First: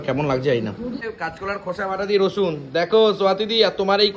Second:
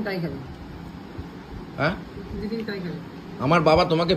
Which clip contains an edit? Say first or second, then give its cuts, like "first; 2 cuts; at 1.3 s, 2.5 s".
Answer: first; 1 cut; at 1.0 s